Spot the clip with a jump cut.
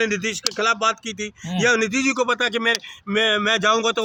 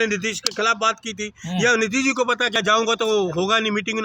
second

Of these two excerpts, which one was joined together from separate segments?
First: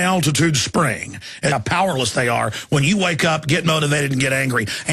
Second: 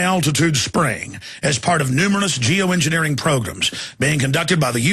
second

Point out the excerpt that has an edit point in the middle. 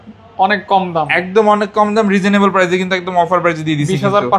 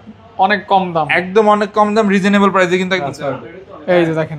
second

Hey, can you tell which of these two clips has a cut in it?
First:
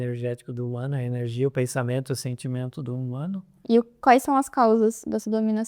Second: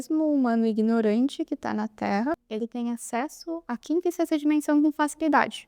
second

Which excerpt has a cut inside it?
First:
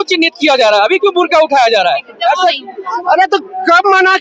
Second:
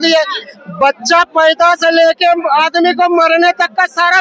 first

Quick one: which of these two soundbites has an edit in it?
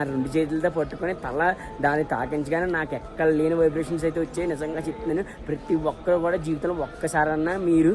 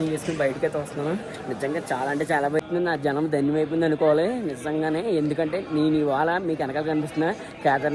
second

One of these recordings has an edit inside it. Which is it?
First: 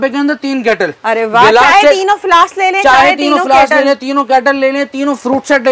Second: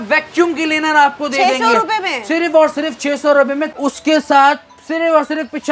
second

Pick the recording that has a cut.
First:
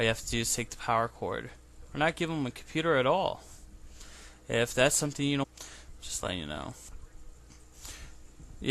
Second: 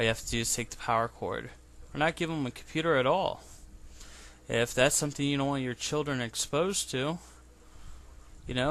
second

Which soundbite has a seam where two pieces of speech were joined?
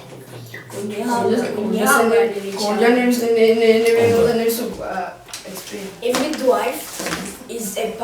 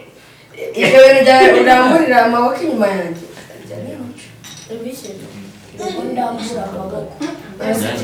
first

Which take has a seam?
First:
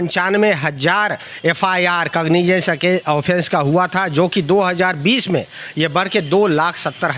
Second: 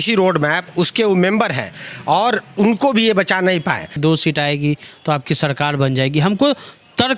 second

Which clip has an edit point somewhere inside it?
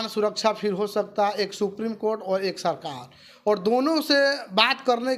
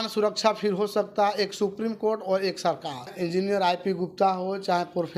second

